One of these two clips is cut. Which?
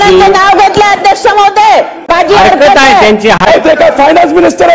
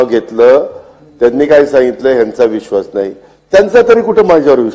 first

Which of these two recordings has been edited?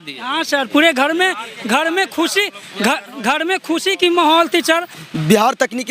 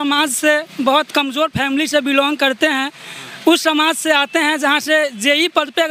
first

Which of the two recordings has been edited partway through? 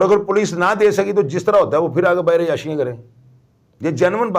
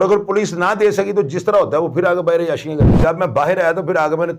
second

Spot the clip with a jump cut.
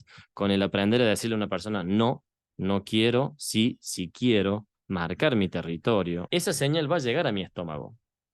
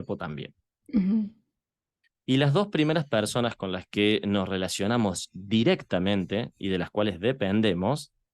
first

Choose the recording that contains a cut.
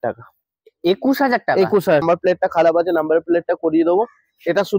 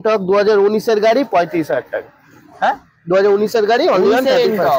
first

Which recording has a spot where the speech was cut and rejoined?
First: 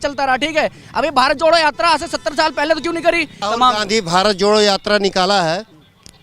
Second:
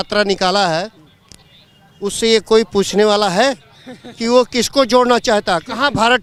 first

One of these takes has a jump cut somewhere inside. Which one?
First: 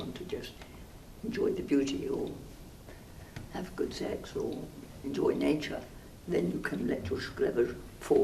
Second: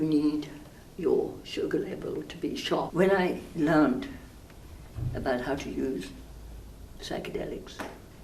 second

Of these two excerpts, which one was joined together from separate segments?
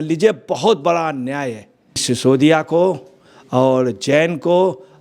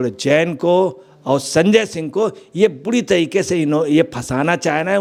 first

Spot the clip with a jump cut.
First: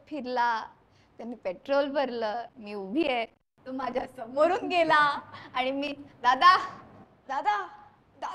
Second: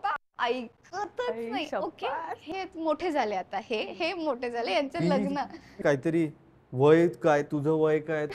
second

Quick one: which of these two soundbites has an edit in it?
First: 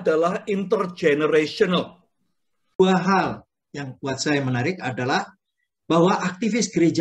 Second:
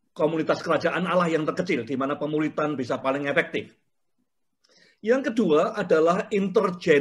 first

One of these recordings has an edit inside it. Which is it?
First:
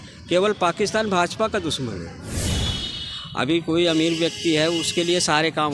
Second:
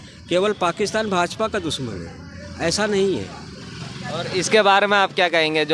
first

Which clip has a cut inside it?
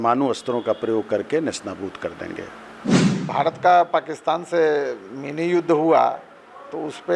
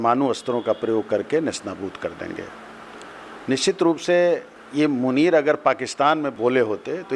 first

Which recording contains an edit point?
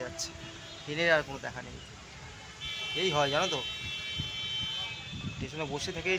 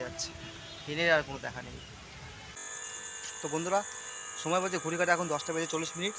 second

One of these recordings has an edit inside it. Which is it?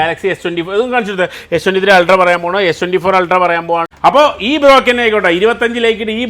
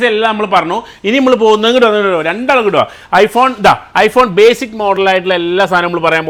first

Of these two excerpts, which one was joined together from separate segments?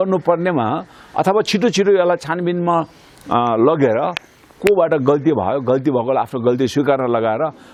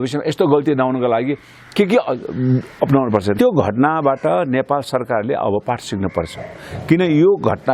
second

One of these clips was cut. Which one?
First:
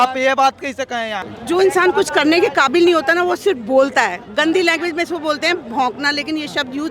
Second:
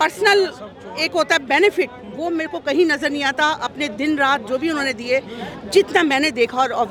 first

